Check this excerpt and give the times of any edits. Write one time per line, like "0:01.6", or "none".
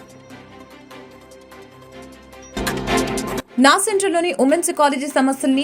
0:02.5
0:03.5